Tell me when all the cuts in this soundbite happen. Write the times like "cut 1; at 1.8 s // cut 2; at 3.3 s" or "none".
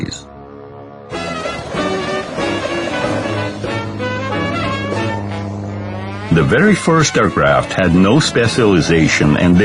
cut 1; at 4.6 s